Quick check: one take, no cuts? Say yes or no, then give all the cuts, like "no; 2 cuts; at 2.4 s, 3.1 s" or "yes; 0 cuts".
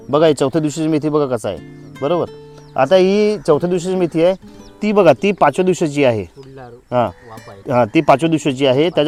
yes; 0 cuts